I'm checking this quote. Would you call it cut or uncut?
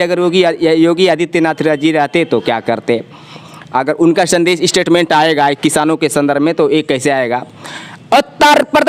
uncut